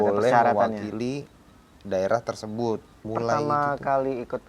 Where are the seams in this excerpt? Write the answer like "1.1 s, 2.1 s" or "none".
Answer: 3.1 s